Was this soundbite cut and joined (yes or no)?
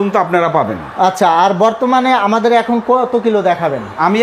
no